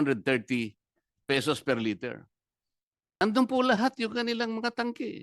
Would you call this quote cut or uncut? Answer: cut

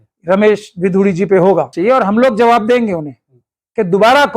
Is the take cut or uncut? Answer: cut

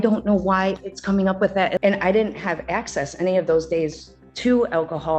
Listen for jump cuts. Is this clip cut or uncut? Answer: cut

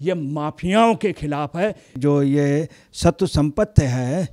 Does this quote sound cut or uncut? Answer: cut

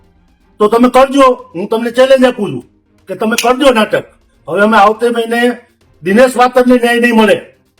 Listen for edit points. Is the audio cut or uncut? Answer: uncut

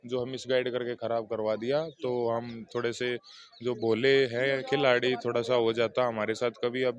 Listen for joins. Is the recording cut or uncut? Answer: uncut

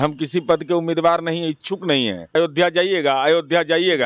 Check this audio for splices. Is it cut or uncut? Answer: cut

